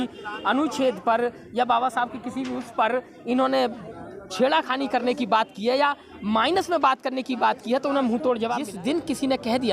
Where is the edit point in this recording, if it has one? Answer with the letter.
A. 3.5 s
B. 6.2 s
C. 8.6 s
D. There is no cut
C